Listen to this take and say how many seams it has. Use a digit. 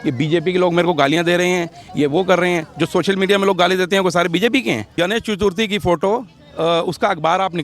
1